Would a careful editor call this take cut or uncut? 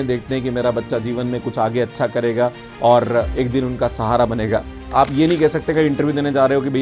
cut